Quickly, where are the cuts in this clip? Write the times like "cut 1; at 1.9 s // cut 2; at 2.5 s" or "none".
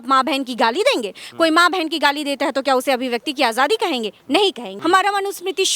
cut 1; at 4.7 s